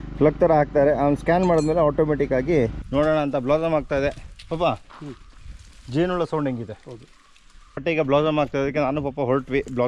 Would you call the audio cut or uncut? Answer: cut